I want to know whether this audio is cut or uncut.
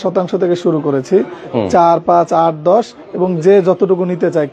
uncut